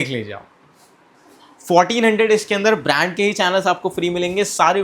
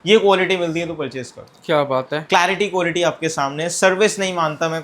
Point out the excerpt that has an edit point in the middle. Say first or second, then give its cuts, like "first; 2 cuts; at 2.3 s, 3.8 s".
first; 1 cut; at 1.2 s